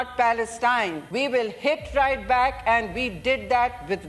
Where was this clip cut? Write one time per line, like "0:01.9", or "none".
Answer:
0:01.0

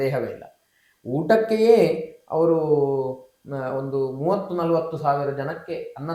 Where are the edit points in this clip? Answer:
none

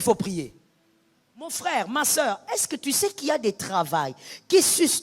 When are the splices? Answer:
0:01.6

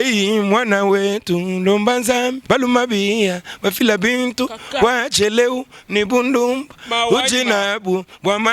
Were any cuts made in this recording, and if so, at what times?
0:02.4

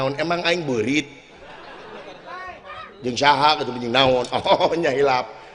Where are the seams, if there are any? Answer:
none

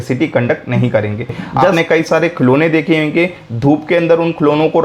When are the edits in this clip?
0:01.7

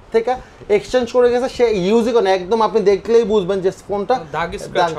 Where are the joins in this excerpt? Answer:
none

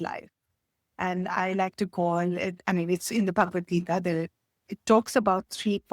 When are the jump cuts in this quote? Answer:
none

